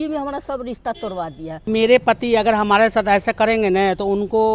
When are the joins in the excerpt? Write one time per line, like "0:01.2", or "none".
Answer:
0:01.7